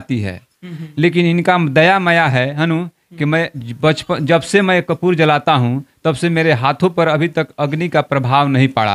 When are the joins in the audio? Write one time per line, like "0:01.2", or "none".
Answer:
none